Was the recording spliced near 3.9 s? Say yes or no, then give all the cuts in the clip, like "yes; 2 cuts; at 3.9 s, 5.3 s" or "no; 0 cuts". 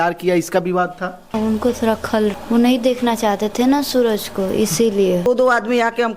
no; 3 cuts; at 1.3 s, 2.4 s, 5.3 s